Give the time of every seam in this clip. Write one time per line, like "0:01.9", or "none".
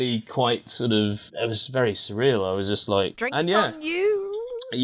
0:01.3
0:03.2